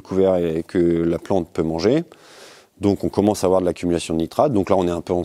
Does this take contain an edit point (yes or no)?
no